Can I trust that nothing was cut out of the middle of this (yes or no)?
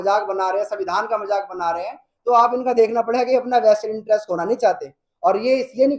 yes